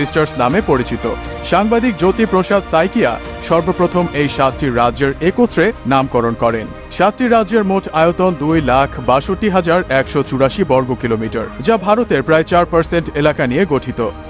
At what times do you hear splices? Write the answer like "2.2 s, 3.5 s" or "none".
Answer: none